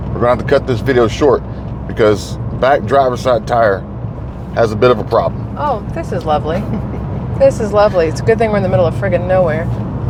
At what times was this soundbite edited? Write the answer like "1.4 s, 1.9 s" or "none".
none